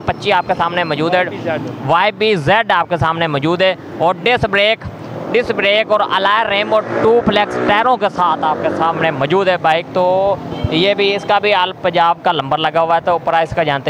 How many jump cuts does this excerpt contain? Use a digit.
0